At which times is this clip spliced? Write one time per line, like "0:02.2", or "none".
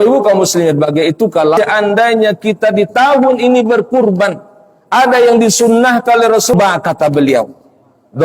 0:01.6
0:06.5